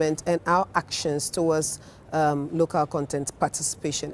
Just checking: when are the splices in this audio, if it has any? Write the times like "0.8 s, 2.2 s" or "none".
2.6 s